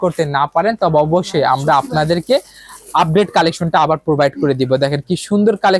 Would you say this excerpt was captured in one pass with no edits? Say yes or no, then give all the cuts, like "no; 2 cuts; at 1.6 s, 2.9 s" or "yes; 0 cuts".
yes; 0 cuts